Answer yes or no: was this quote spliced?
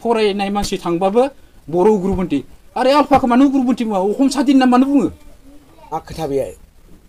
yes